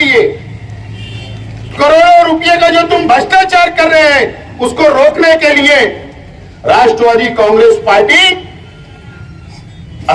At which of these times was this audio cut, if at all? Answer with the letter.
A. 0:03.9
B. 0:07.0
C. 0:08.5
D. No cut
D